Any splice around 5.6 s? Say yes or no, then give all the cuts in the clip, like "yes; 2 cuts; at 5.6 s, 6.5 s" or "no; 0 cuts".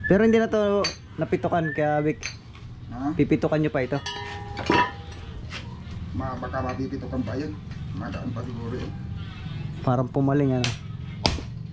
no; 0 cuts